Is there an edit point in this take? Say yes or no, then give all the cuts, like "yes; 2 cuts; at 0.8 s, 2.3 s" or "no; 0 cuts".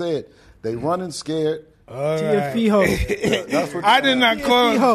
yes; 1 cut; at 1.8 s